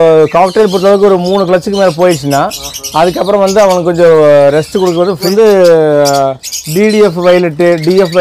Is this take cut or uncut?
cut